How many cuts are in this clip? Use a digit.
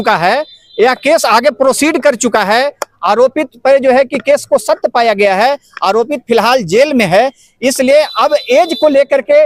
0